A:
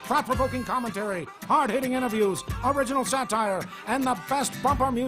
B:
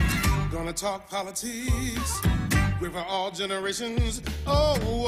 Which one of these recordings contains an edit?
A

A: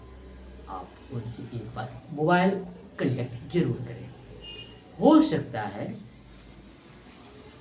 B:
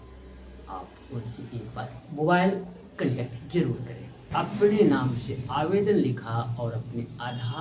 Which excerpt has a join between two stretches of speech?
B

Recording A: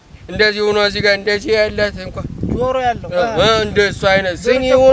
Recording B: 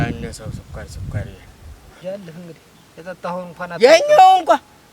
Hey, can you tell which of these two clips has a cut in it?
B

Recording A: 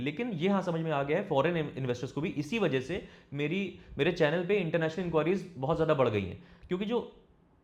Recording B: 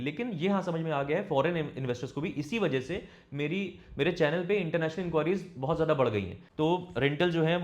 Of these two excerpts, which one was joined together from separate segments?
B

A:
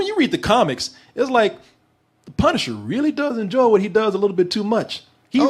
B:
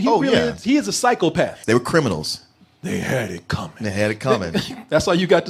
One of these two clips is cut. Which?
B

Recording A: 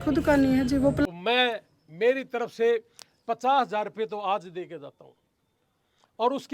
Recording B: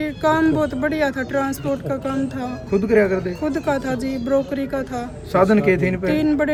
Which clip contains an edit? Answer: A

